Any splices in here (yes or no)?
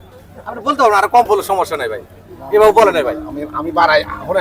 no